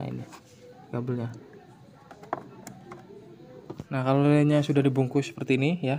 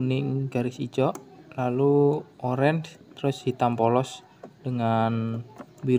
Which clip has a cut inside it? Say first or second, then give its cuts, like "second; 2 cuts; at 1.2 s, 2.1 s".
first; 1 cut; at 3.8 s